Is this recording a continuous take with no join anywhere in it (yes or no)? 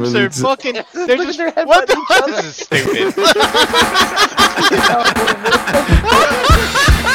yes